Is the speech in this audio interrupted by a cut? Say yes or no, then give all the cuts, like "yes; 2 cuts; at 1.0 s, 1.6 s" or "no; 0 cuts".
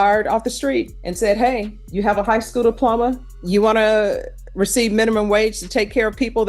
yes; 3 cuts; at 1.0 s, 1.8 s, 3.3 s